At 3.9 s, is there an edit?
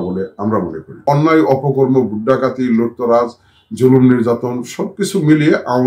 no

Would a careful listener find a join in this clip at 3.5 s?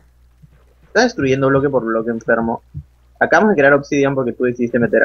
no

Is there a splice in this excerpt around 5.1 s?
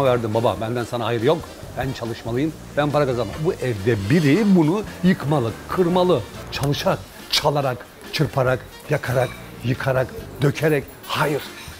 no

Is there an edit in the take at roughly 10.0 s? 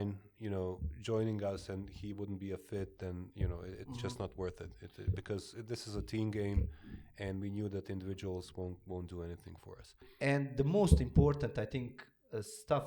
yes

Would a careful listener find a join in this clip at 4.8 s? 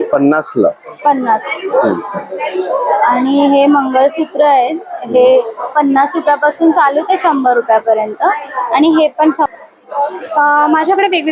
no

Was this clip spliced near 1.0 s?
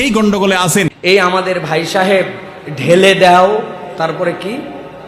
yes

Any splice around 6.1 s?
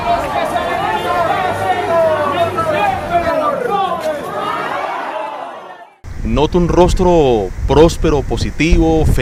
no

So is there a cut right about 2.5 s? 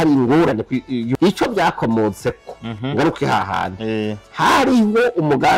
no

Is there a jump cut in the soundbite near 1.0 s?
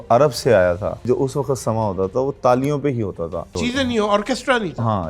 yes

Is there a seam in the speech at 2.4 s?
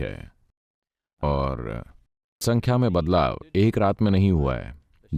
yes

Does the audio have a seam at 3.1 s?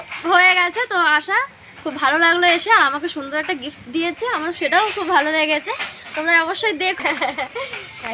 no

